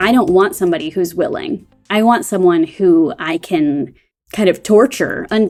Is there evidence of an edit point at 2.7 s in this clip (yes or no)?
no